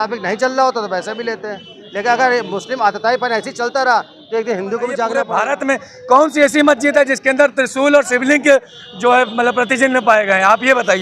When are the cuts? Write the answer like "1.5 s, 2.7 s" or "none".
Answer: 5.3 s

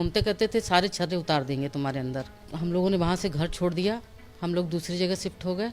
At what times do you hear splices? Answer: 2.4 s

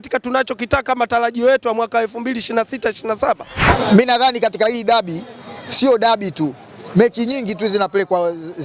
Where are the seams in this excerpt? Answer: 3.7 s

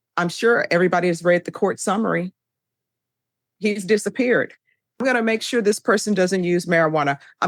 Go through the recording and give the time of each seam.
4.8 s

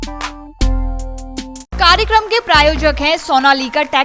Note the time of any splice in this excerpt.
1.7 s

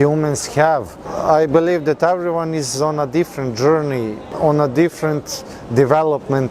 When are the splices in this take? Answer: 1.1 s, 4.2 s

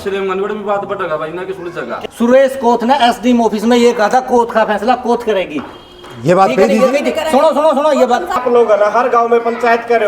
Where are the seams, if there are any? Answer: 1.9 s, 8.4 s

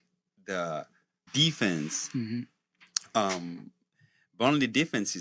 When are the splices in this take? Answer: none

